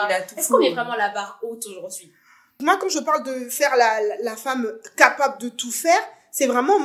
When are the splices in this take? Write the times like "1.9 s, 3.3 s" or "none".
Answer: 2.5 s